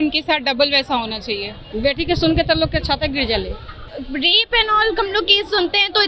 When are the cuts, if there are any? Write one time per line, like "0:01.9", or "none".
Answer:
0:01.6
0:03.8